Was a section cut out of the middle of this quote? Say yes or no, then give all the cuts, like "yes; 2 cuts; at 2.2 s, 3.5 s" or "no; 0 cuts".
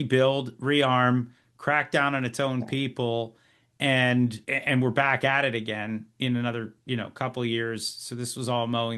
yes; 1 cut; at 4.5 s